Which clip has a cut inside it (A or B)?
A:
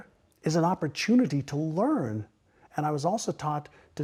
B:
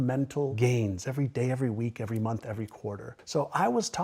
B